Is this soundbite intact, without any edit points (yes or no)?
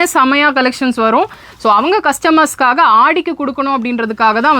yes